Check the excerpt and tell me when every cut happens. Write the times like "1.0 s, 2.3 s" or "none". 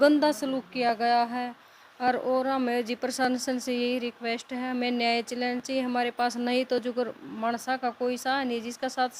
none